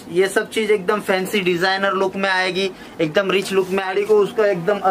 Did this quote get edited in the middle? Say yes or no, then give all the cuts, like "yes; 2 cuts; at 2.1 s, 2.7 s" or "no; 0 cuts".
yes; 1 cut; at 3.9 s